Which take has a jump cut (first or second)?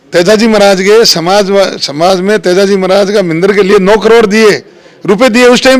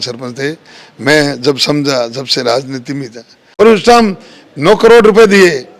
second